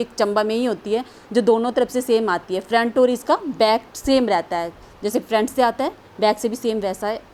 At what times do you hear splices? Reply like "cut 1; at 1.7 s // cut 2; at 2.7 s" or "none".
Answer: none